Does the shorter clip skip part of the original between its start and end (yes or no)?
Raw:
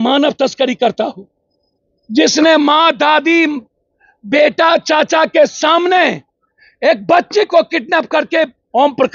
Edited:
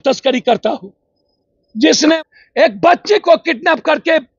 yes